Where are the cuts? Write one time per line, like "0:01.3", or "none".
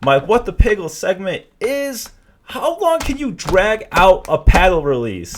none

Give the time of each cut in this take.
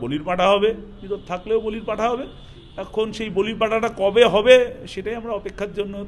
none

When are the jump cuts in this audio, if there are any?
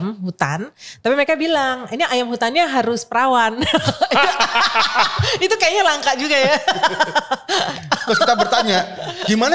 none

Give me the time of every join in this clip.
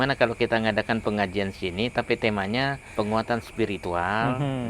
0:02.8

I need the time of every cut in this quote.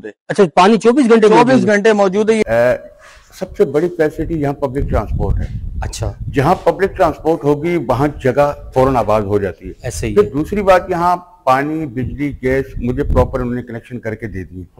0:02.4

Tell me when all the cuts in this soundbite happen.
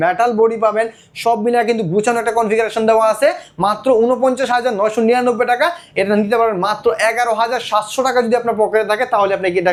none

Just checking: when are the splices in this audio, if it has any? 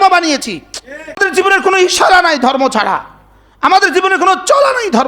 0:01.2

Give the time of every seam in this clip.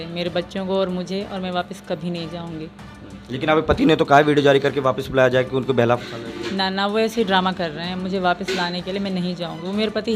none

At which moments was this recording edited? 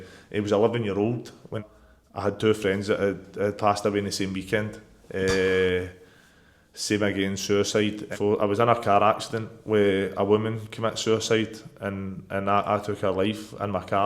0:01.6
0:08.1

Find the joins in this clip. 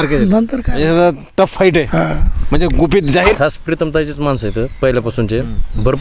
0:03.4

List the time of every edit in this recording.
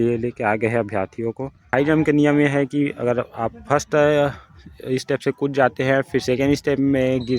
0:01.7

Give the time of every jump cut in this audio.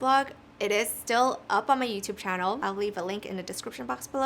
0:02.6

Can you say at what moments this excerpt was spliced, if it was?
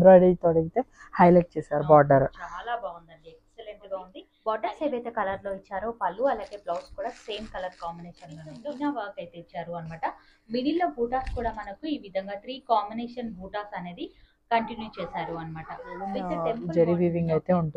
0:04.2
0:08.7
0:16.5

